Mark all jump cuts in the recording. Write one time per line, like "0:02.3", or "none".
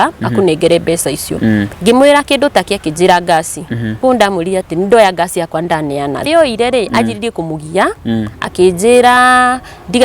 0:06.3